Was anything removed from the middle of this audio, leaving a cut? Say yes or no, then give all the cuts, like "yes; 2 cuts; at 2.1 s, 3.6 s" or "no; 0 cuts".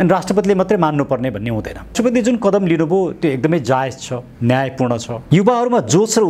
yes; 2 cuts; at 1.9 s, 5.1 s